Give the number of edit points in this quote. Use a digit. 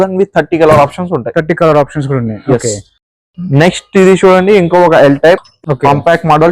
0